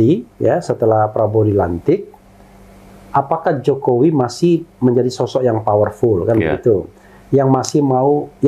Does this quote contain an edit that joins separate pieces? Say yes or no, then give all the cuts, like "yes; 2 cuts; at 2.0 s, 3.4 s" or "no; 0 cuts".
no; 0 cuts